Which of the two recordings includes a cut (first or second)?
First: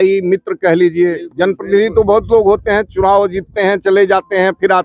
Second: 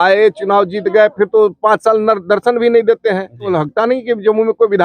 second